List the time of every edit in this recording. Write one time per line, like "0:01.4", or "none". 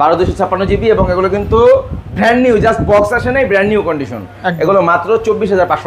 none